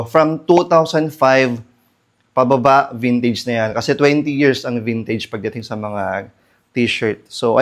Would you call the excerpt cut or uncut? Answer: uncut